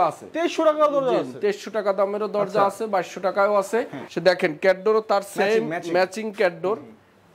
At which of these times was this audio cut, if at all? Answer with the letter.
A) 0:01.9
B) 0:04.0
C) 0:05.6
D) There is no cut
B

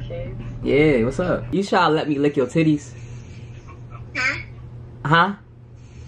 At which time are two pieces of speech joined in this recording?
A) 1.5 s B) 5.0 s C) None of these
A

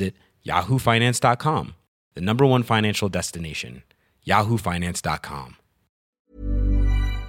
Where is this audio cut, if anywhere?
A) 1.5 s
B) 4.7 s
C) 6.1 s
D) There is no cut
C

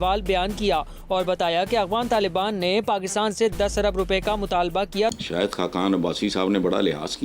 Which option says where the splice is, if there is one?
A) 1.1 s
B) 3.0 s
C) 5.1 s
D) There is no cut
C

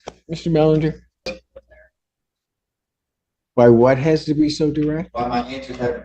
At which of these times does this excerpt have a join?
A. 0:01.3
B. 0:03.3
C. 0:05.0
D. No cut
A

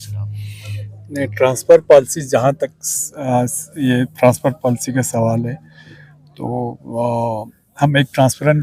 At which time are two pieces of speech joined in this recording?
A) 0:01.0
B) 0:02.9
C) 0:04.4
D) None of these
D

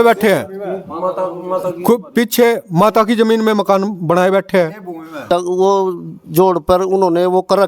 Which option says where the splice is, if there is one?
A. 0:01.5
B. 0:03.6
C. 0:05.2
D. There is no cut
C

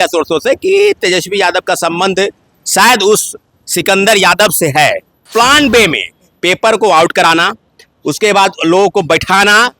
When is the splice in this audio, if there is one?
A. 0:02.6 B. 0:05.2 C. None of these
B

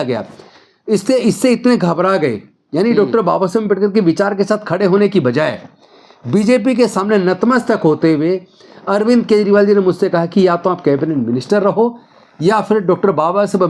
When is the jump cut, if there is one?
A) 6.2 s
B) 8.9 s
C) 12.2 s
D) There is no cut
D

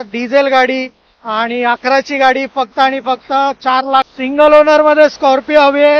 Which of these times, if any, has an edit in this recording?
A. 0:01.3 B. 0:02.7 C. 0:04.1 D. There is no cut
C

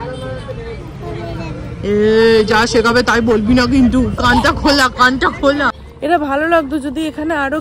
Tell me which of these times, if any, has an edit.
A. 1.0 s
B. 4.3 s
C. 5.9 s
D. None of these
C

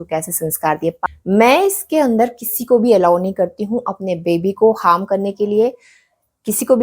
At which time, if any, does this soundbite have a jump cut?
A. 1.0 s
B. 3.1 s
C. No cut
A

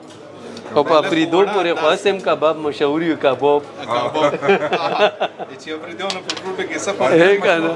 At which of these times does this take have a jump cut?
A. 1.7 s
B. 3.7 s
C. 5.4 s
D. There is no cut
D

